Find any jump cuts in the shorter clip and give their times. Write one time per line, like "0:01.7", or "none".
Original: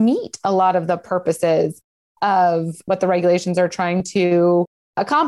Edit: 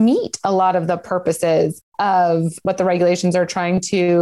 0:01.8